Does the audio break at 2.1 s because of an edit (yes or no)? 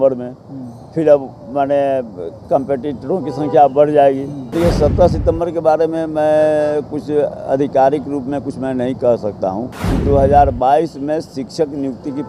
no